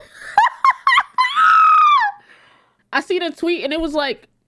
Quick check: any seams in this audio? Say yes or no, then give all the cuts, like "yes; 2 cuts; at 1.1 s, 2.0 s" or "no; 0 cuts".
yes; 1 cut; at 2.8 s